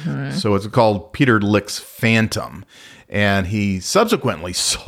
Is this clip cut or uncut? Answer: uncut